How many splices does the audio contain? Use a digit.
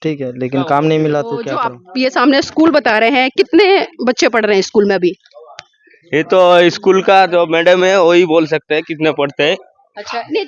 1